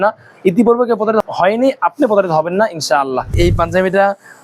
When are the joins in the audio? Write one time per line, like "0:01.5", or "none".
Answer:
0:01.2
0:03.4